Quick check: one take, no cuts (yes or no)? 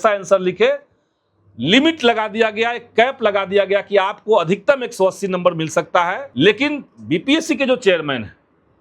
no